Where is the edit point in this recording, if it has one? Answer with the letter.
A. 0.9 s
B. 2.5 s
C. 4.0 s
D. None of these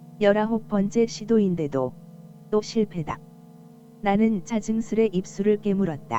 D